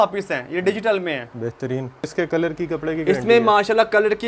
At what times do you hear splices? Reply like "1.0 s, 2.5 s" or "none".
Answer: 2.1 s